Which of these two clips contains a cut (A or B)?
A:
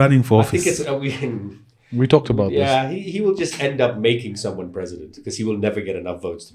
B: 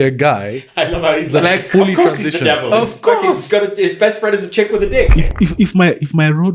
B